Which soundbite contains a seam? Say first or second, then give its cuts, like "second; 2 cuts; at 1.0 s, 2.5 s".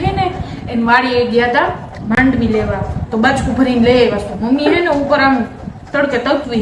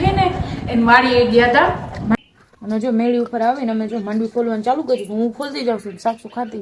second; 1 cut; at 2.2 s